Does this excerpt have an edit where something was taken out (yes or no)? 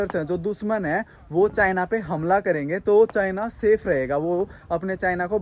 no